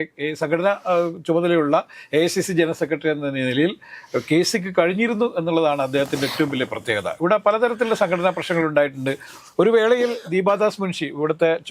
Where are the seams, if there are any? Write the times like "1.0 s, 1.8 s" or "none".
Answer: none